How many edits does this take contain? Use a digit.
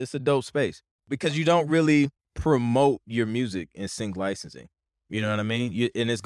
2